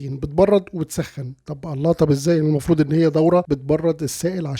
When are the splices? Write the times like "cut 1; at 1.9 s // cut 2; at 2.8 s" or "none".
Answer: cut 1; at 3.5 s